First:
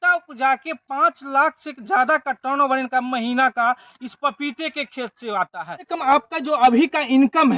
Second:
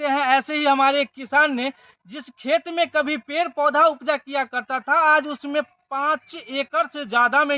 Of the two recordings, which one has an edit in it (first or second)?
first